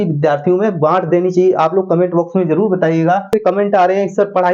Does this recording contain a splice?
yes; 1 cut; at 3.3 s

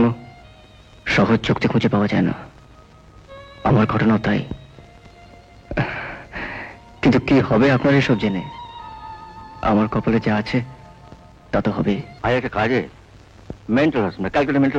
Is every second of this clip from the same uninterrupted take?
no; 1 cut; at 12.1 s

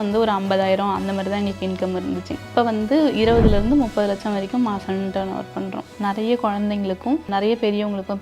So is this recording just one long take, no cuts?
no; 3 cuts; at 2.5 s, 5.9 s, 7.3 s

